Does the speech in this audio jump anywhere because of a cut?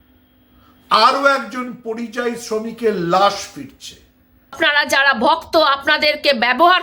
yes; 1 cut; at 4.5 s

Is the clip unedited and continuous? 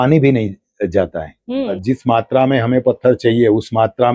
no; 1 cut; at 1.8 s

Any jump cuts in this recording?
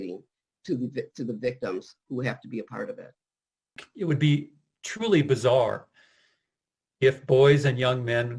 yes; 1 cut; at 3.8 s

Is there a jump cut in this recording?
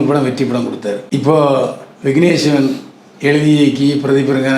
yes; 1 cut; at 1.0 s

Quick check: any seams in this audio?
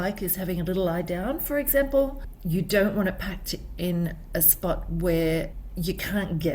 yes; 1 cut; at 5.6 s

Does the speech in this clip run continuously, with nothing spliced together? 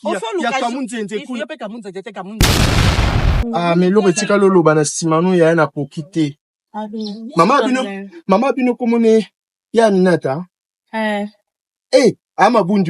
no; 2 cuts; at 2.3 s, 3.4 s

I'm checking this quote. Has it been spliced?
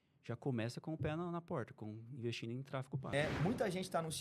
yes; 1 cut; at 3.1 s

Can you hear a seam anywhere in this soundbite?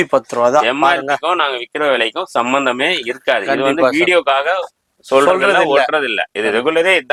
no; 0 cuts

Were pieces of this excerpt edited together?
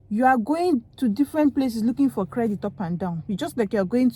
no; 0 cuts

